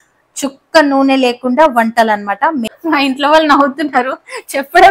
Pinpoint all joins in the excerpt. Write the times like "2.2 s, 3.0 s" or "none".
2.7 s